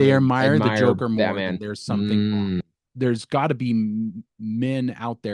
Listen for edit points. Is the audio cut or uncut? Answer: cut